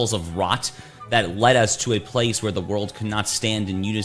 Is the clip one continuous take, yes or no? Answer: yes